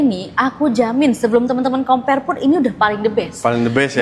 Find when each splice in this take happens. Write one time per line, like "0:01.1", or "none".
none